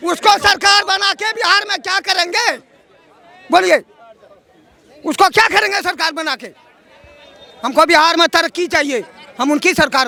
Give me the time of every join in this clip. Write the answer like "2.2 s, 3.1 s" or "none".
none